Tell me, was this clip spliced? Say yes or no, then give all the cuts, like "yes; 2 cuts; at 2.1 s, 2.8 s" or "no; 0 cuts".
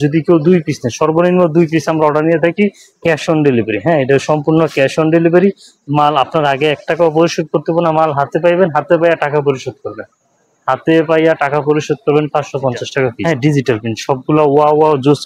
yes; 1 cut; at 13.2 s